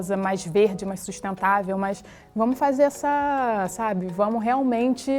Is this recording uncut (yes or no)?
yes